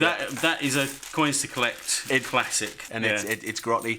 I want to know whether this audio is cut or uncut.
cut